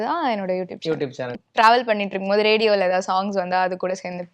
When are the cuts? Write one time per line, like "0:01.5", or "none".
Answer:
0:01.3

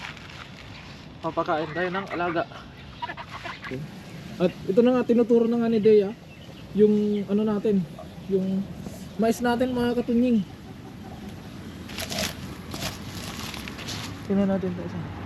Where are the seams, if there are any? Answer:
0:03.6

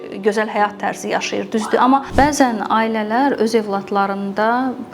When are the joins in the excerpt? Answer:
0:02.1

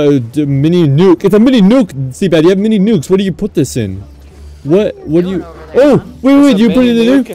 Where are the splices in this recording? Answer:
none

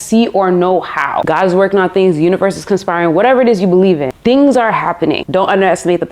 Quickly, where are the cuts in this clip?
0:01.2
0:04.1
0:05.2

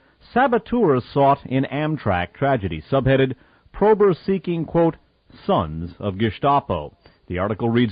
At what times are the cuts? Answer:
0:02.5

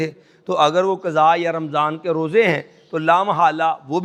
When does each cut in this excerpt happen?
none

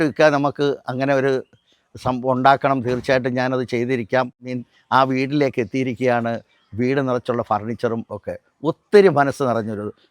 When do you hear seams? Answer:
0:04.5

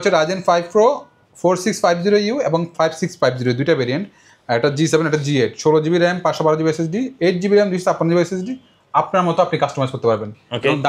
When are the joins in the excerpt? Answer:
none

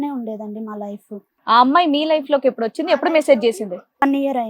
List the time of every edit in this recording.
0:01.2

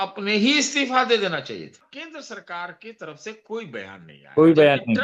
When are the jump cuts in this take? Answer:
0:01.9

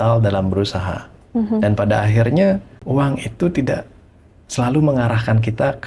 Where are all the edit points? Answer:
0:02.7

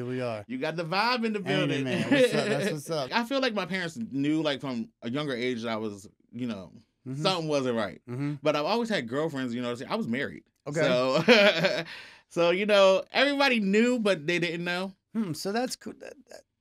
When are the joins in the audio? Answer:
0:03.1

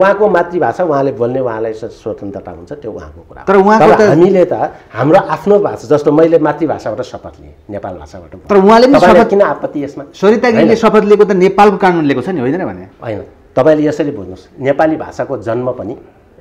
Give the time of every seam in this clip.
none

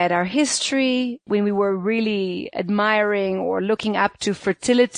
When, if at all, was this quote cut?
0:01.3

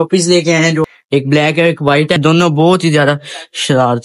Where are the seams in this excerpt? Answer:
0:00.9
0:02.2

